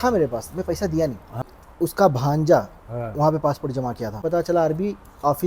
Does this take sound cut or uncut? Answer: cut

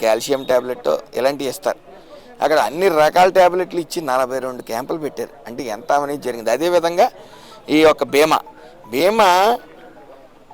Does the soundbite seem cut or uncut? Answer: uncut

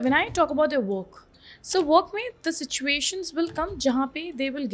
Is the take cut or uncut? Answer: uncut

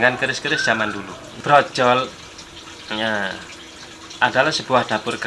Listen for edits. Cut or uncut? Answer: cut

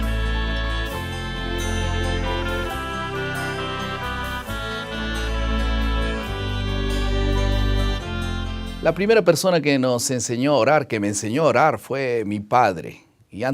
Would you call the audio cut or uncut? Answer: cut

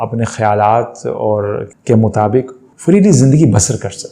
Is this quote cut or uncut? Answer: cut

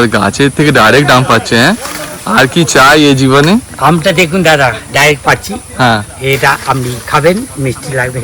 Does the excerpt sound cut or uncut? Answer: uncut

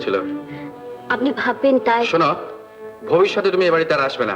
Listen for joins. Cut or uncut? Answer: uncut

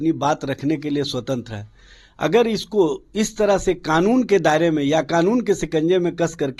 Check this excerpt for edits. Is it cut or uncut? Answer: uncut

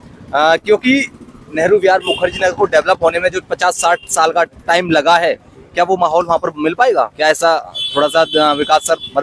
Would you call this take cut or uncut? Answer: uncut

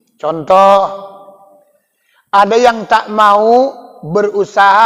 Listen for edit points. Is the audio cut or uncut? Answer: uncut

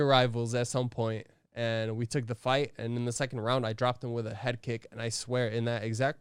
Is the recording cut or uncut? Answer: uncut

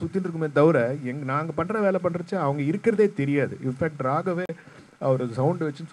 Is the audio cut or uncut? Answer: uncut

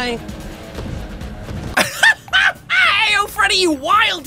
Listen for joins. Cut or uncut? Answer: cut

